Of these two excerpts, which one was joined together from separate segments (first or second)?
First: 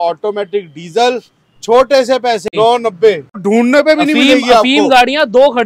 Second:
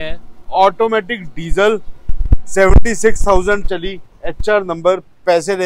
first